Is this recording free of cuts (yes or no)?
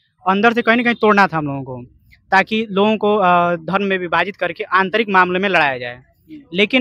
yes